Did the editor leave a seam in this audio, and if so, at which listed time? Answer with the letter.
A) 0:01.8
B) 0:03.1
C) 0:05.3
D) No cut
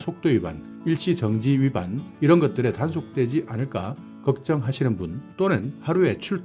D